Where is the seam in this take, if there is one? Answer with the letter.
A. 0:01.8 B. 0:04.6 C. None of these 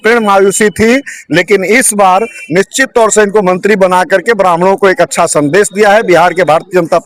C